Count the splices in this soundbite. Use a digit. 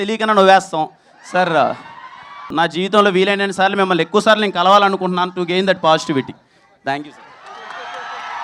1